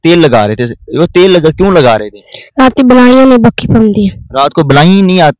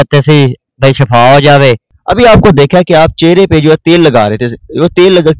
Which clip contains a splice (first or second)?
second